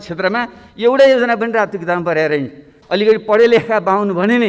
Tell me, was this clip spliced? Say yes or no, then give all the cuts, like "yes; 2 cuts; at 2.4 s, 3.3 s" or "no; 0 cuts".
yes; 1 cut; at 2.7 s